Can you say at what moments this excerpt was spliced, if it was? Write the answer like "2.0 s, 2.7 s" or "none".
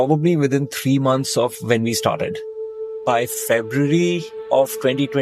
2.9 s